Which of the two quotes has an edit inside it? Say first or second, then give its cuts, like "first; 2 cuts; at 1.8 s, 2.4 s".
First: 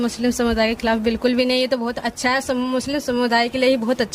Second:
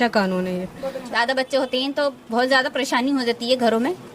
second; 1 cut; at 1.0 s